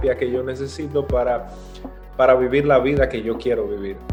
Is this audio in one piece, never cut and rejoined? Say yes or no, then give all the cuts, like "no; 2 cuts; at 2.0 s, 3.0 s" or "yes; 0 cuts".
yes; 0 cuts